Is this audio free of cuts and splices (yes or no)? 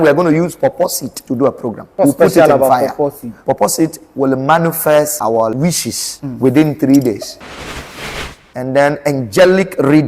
no